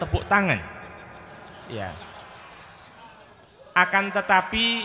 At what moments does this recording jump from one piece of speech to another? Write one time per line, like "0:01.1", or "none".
none

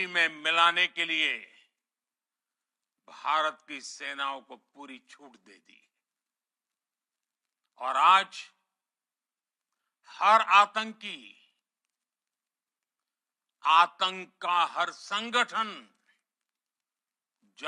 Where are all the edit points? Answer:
none

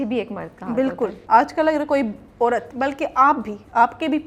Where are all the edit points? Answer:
0:01.2
0:02.7

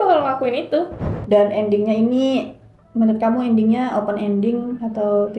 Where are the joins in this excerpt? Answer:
0:01.2

